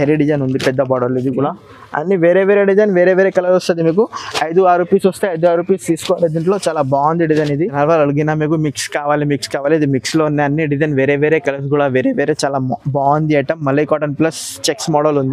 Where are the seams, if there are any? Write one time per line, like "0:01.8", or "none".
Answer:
0:07.7